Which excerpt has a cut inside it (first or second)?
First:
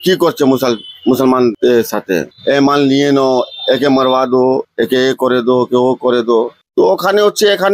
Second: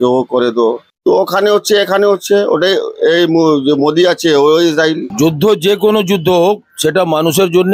second